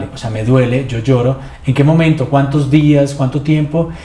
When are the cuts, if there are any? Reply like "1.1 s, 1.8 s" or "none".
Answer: none